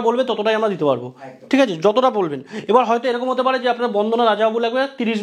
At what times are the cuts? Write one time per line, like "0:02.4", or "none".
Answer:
none